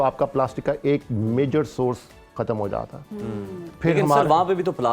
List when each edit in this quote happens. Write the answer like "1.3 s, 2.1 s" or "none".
none